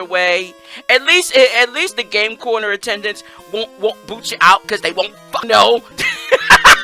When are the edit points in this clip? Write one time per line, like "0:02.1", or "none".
0:05.4